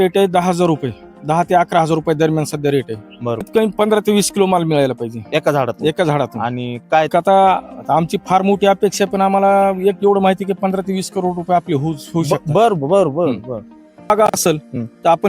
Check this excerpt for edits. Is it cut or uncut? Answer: cut